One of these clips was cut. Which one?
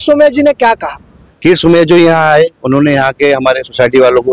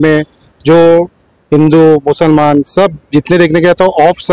first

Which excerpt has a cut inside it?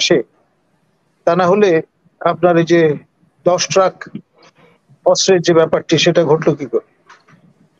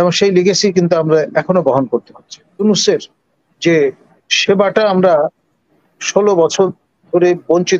second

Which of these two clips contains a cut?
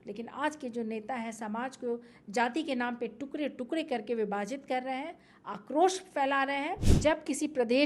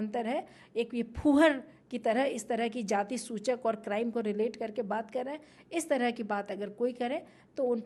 first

